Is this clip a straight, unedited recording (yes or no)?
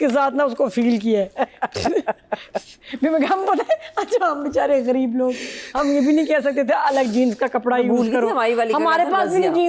yes